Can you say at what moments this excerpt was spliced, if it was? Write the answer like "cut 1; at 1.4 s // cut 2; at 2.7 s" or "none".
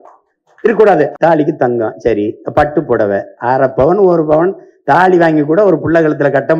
cut 1; at 1.1 s

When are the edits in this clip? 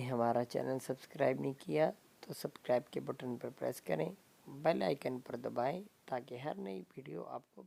none

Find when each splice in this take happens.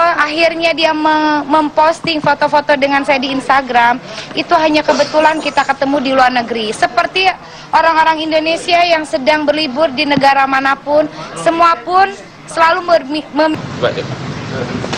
cut 1; at 13.6 s

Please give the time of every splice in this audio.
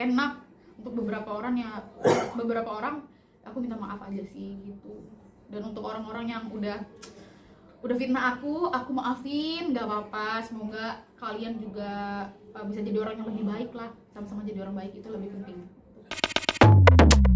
cut 1; at 16.3 s

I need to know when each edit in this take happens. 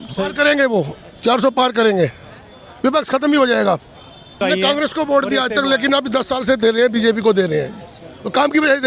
cut 1; at 4.4 s

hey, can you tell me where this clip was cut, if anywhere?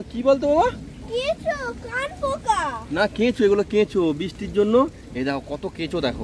none

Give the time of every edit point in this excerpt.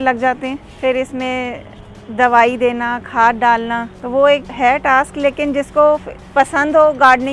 cut 1; at 4.0 s // cut 2; at 4.5 s // cut 3; at 6.2 s

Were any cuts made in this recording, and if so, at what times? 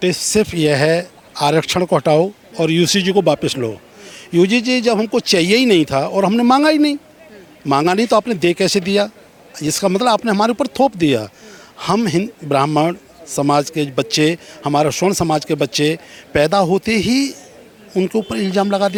none

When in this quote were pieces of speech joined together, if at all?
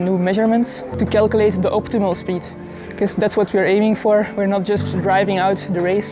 cut 1; at 1.0 s

